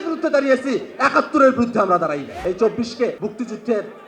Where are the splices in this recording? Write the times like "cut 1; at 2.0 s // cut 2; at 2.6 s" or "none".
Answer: cut 1; at 2.3 s // cut 2; at 3.2 s